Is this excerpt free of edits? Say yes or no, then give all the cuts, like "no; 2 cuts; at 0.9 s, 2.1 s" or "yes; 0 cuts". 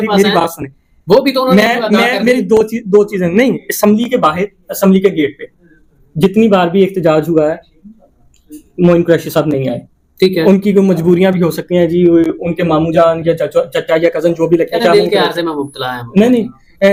yes; 0 cuts